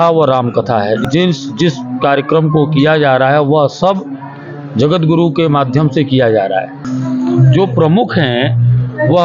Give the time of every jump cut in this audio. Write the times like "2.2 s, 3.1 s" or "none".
1.0 s, 6.8 s